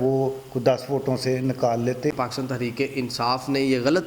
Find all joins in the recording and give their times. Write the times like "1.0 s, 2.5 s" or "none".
2.1 s

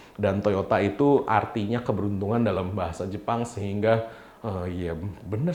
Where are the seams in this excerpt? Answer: none

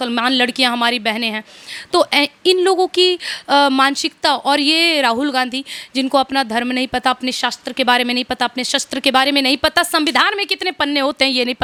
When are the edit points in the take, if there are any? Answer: none

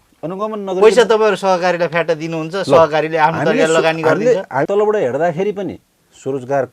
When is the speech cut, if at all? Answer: 4.7 s

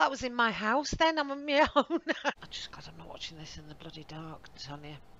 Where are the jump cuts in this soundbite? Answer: 2.5 s

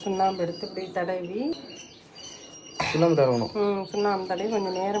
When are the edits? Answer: 1.6 s

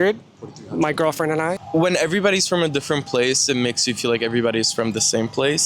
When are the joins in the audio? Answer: 1.6 s

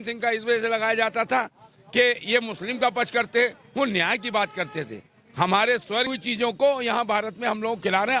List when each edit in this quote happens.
6.1 s

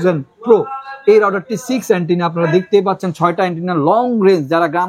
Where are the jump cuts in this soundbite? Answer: none

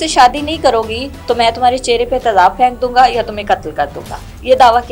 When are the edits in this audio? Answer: none

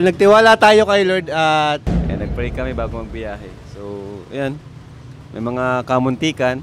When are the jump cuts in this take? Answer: 1.9 s

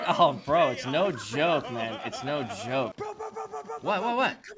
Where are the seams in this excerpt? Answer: 2.9 s

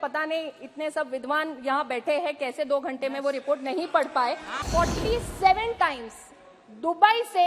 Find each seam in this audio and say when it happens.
4.6 s

